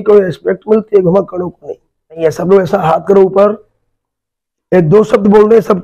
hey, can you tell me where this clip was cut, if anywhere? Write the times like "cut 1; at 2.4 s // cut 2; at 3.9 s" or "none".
cut 1; at 2.2 s